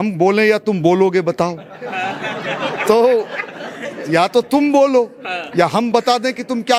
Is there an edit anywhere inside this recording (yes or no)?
no